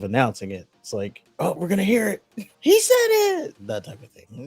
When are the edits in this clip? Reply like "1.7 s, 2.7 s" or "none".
1.6 s, 3.6 s